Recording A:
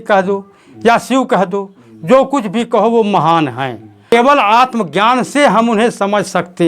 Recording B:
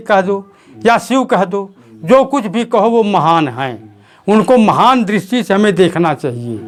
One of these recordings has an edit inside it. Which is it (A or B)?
A